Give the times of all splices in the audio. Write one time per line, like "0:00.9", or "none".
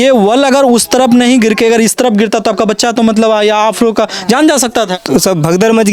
0:05.0